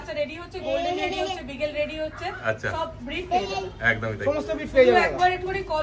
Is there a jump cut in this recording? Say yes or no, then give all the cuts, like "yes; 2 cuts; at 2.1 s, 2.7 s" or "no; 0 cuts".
no; 0 cuts